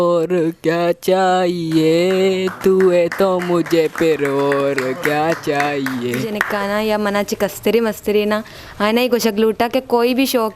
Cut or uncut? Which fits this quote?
cut